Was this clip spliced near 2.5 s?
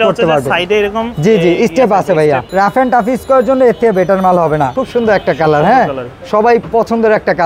yes; 2 cuts; at 2.5 s, 4.8 s

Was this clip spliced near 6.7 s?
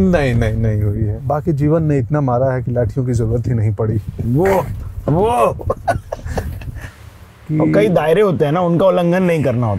yes; 2 cuts; at 1.1 s, 6.7 s

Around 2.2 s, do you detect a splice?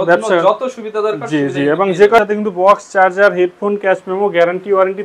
yes; 1 cut; at 2.2 s

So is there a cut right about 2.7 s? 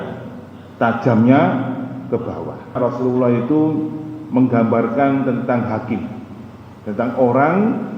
yes; 1 cut; at 2.7 s

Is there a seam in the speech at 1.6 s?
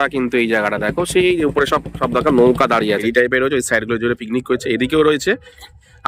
no; 1 cut; at 3.0 s

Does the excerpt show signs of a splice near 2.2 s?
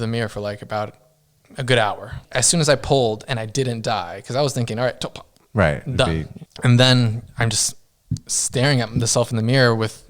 yes; 2 cuts; at 2.2 s, 6.4 s

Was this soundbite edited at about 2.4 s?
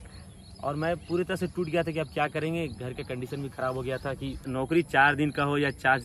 no; 1 cut; at 4.5 s

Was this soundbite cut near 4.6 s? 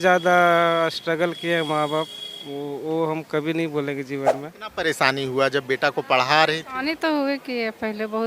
yes; 1 cut; at 4.6 s

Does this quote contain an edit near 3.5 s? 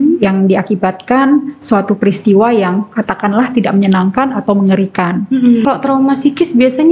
no; 1 cut; at 5.6 s

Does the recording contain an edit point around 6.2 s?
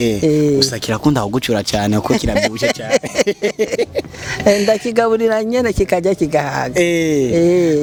no; 0 cuts

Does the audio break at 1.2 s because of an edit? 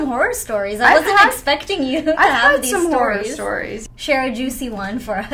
no; 1 cut; at 3.7 s

